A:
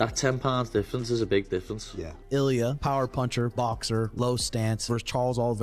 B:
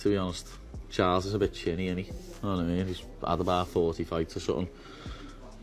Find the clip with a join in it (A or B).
A